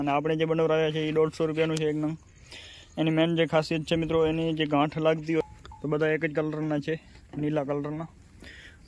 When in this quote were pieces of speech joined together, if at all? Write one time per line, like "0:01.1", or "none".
0:05.4